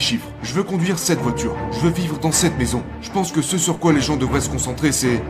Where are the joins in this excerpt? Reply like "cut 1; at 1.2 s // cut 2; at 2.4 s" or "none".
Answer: cut 1; at 3.0 s